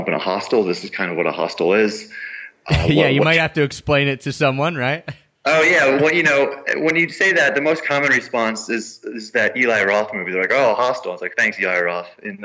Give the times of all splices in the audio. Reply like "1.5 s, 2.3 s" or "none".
none